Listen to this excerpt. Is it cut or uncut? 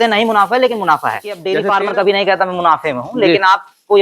cut